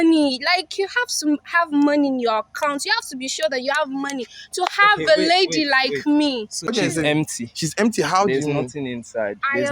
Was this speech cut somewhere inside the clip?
yes; 1 cut; at 6.7 s

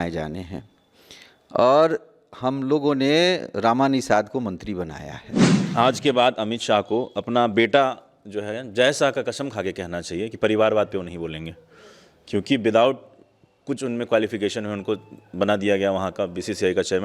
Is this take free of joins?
no; 1 cut; at 5.6 s

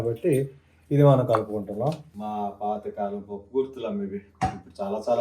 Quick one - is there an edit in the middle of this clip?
yes; 1 cut; at 2.1 s

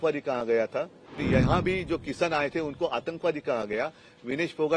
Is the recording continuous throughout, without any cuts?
no; 1 cut; at 1.2 s

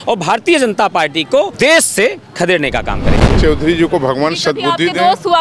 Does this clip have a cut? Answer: yes; 2 cuts; at 1.5 s, 3.3 s

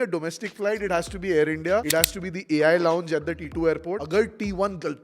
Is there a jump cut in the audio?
yes; 2 cuts; at 1.9 s, 3.7 s

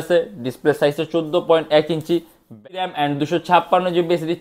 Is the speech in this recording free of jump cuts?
no; 1 cut; at 2.5 s

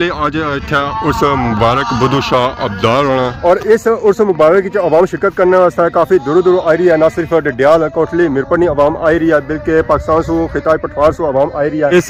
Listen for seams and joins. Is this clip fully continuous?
yes; 0 cuts

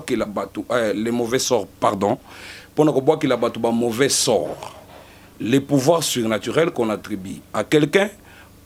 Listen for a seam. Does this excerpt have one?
no; 0 cuts

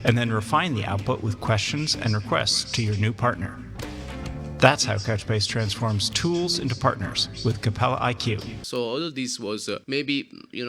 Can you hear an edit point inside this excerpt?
yes; 2 cuts; at 8.6 s, 9.8 s

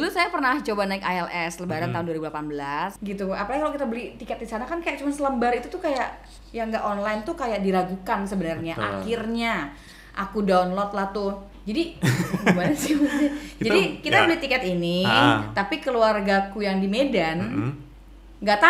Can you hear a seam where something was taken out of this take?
yes; 2 cuts; at 3.0 s, 11.5 s

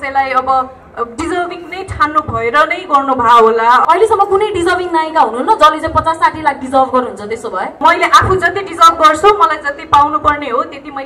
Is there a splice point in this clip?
yes; 2 cuts; at 3.8 s, 7.8 s

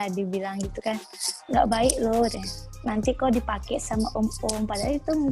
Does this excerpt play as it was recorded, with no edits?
yes; 0 cuts

